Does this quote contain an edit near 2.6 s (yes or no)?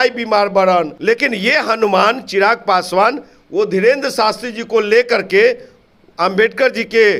no